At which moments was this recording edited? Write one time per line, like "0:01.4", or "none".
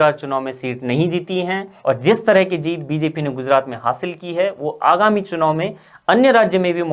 0:01.7

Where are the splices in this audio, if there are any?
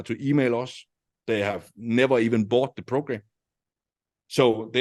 none

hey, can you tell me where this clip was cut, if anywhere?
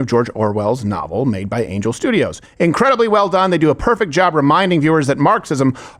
none

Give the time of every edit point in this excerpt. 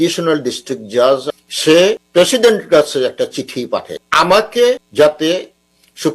0:01.2
0:02.0
0:04.0
0:04.8

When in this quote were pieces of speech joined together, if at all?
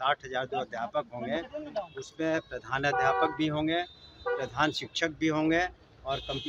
none

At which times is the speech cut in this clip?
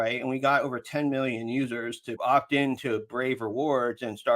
0:02.1

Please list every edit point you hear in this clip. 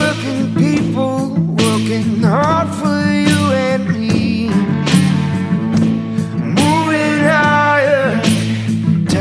none

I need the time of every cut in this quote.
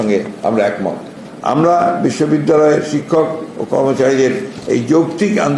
0:01.2

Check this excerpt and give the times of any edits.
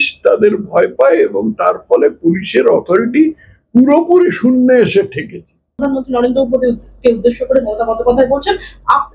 0:05.7

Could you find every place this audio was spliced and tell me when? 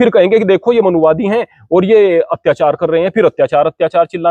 none

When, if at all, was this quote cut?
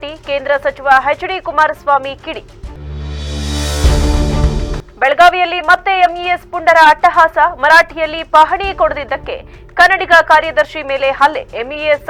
none

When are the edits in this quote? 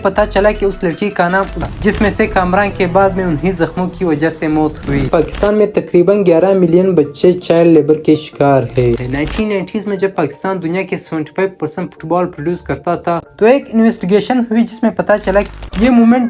0:01.7
0:05.1
0:09.0
0:15.5

